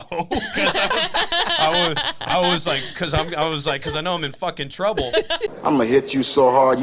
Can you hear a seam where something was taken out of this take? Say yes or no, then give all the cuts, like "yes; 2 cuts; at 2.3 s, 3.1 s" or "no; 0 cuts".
yes; 1 cut; at 5.6 s